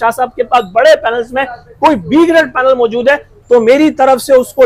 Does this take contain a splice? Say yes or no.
no